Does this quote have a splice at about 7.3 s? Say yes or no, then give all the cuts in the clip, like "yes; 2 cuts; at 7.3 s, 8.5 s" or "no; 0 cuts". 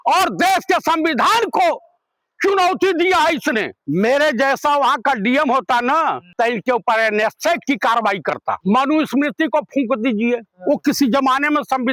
no; 2 cuts; at 3.8 s, 8.6 s